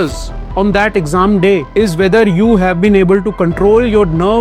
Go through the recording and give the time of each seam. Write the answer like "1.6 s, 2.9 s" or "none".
1.7 s